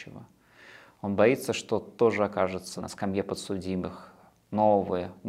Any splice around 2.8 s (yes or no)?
yes